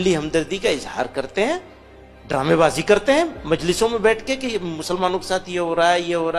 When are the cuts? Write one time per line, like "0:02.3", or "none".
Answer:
none